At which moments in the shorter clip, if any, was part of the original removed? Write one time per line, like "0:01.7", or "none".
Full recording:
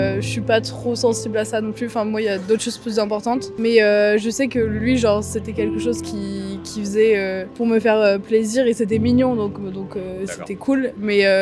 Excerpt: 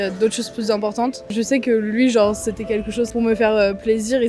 0:01.3
0:03.1